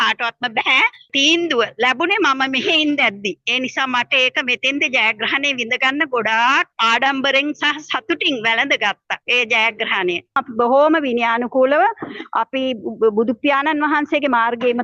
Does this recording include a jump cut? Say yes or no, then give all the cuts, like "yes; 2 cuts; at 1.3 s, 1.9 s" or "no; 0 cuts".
yes; 4 cuts; at 1.1 s, 6.7 s, 9.1 s, 10.5 s